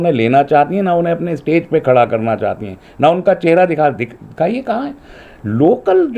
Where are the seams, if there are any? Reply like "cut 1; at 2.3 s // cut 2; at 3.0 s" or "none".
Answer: none